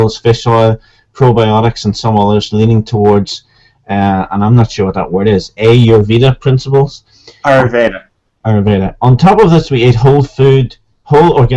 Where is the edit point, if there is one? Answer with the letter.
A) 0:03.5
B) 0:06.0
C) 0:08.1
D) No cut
C